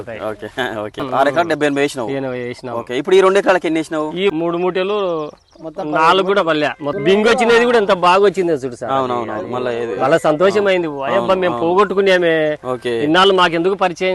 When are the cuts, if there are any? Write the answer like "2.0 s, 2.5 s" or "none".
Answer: 1.1 s, 4.3 s, 6.9 s